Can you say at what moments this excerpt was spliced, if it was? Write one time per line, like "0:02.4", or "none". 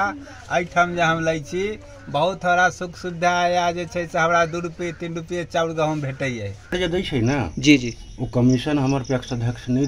0:06.7

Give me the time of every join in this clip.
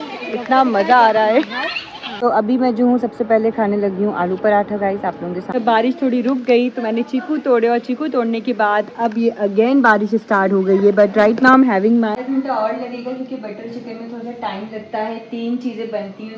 0:02.1
0:05.5
0:12.2

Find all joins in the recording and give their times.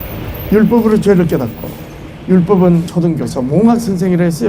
0:02.9

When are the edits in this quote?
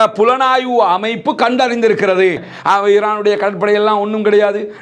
0:02.5

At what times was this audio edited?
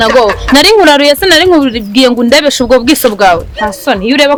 none

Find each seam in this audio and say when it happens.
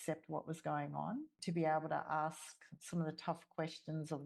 0:01.3

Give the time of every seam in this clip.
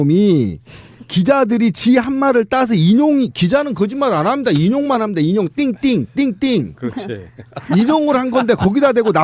none

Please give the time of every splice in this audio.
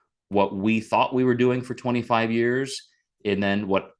none

